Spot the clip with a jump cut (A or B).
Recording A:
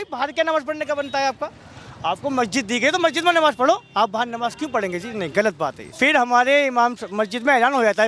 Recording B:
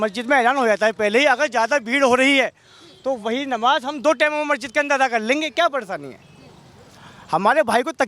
A